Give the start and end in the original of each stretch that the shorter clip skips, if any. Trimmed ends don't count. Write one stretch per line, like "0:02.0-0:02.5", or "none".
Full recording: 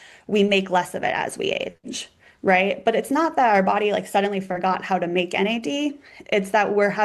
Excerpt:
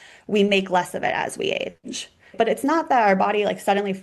0:02.3-0:02.8